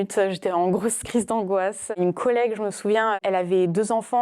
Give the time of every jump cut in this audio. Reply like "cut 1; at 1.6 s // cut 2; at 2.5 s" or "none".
cut 1; at 1.9 s // cut 2; at 3.2 s

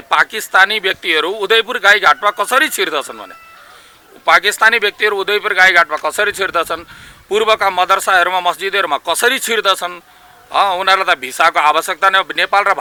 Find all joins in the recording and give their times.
none

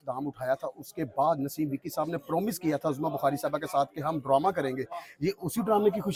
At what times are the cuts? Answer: none

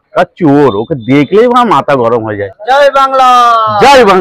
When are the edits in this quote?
none

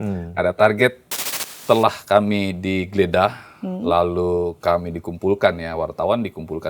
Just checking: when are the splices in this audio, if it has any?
cut 1; at 1.4 s

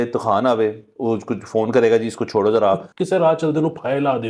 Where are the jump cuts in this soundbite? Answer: cut 1; at 2.9 s

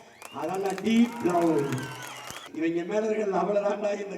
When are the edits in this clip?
cut 1; at 2.4 s

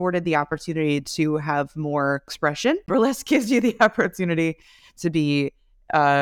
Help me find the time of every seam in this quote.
cut 1; at 2.7 s

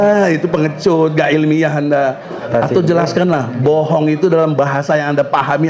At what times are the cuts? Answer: cut 1; at 2.5 s

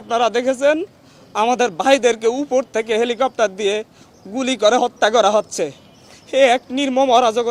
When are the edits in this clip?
none

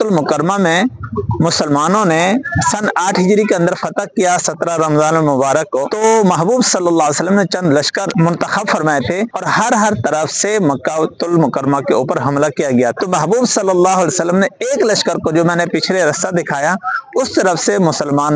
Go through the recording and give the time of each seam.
none

